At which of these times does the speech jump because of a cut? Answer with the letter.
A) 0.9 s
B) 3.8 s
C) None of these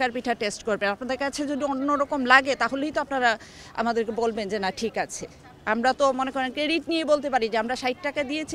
C